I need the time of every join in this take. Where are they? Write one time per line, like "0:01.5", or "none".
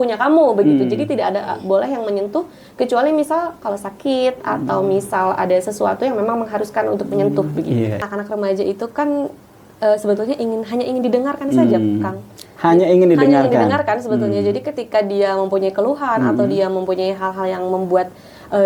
0:08.0